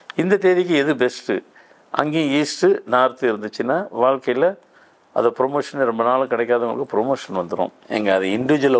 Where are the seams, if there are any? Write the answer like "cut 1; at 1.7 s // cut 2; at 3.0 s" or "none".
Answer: cut 1; at 7.8 s